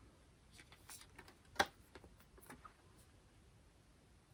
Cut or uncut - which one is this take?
uncut